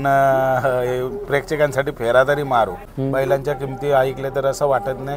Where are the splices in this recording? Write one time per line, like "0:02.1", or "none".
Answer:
0:02.9